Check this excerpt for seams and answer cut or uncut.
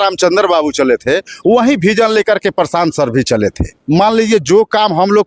cut